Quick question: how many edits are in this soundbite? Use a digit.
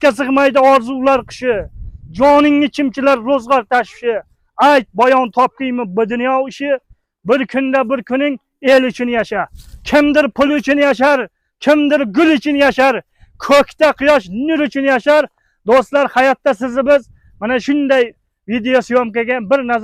0